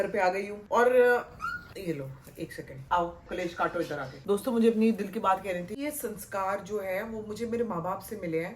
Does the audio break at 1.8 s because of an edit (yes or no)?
no